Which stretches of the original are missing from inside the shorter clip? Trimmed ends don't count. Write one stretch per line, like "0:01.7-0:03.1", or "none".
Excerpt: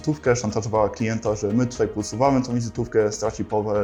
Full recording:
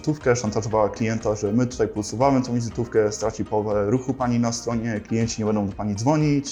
none